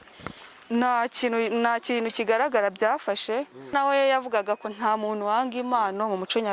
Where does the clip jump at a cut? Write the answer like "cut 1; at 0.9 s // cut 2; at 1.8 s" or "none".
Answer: cut 1; at 3.7 s